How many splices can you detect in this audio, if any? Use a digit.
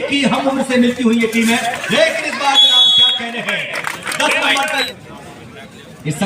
1